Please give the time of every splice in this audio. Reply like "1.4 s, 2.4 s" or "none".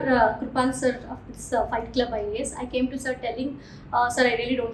none